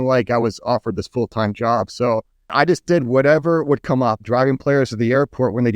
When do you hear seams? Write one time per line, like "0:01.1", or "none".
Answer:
0:02.5
0:04.2